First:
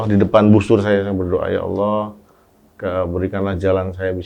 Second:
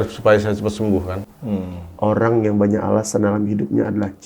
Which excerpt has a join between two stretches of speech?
second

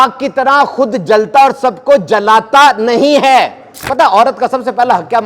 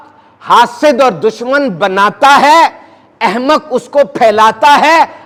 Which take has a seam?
first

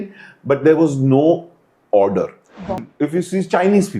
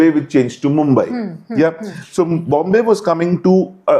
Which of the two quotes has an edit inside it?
first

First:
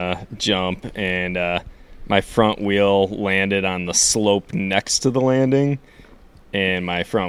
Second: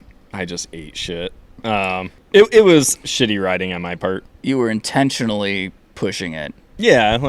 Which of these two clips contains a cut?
second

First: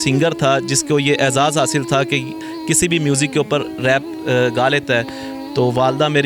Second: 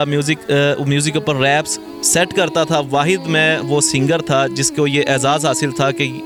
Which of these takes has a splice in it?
first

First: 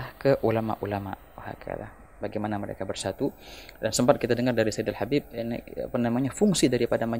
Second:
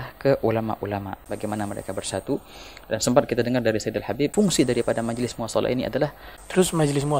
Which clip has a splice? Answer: second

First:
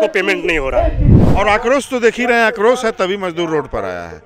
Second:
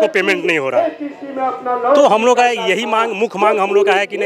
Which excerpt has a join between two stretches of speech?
first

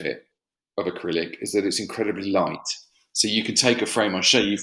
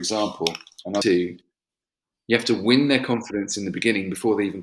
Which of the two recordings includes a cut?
second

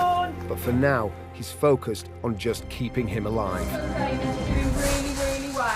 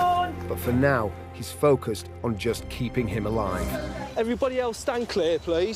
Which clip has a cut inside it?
second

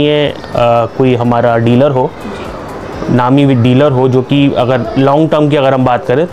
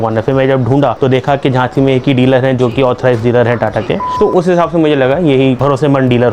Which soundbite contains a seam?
second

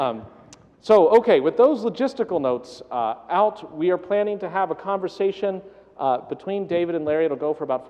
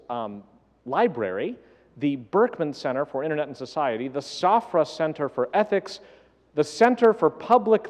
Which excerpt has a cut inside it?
first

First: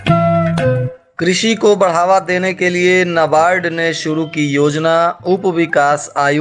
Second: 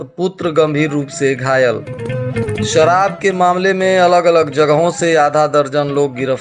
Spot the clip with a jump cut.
first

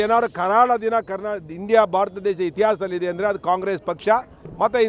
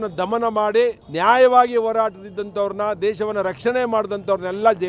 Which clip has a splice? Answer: second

